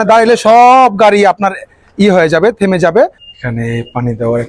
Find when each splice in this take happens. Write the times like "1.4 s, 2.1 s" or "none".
3.2 s